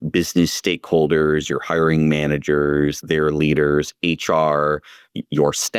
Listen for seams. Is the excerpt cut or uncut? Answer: uncut